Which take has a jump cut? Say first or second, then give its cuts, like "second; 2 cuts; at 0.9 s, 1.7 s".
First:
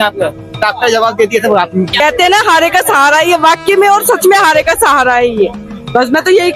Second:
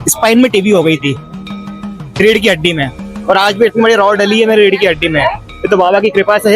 first; 1 cut; at 2.0 s